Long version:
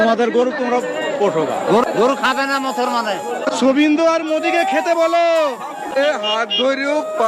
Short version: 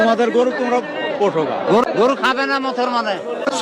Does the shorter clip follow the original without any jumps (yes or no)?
yes